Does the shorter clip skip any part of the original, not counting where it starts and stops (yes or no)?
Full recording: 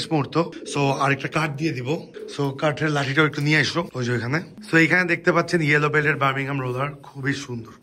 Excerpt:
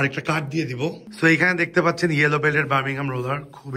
yes